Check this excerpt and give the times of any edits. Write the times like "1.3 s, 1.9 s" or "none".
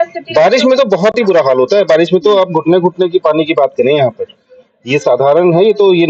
none

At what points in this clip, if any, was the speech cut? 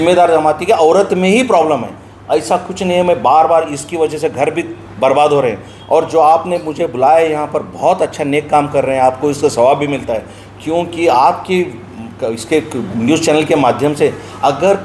none

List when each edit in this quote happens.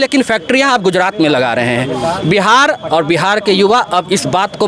none

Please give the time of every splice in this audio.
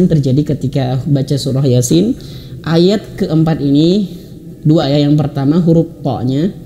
none

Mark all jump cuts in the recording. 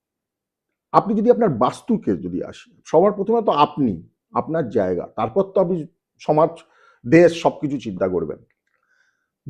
none

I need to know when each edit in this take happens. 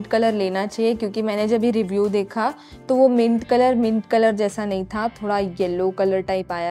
none

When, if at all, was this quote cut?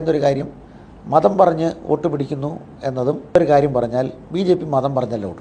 3.4 s

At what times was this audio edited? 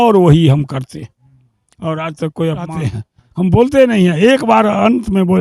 2.8 s

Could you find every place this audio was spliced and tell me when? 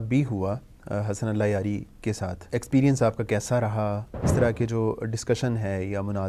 2.4 s, 4.3 s

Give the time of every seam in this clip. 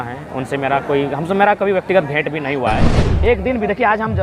3.1 s

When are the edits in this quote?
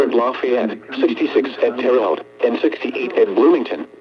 none

